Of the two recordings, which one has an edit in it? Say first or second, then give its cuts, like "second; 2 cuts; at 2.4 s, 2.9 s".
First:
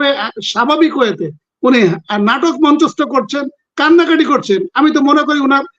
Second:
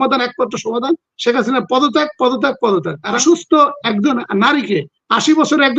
second; 1 cut; at 3.2 s